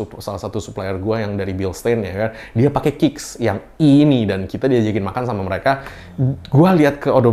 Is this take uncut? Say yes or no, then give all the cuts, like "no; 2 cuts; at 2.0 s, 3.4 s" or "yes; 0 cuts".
yes; 0 cuts